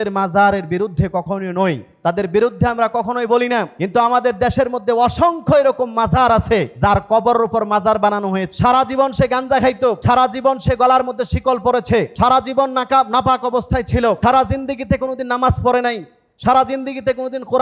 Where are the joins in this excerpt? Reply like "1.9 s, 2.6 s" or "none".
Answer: 1.9 s, 3.8 s, 6.7 s, 8.5 s, 10.0 s, 12.1 s, 14.2 s